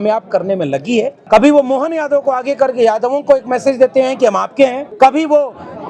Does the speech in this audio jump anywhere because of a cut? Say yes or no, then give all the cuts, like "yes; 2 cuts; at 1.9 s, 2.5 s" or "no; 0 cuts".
yes; 2 cuts; at 1.2 s, 4.8 s